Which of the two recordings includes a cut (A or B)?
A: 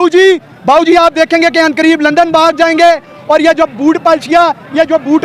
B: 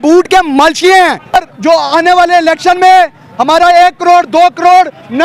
B